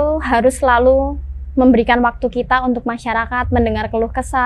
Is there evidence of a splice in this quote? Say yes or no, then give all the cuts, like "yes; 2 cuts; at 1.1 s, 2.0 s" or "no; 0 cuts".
no; 0 cuts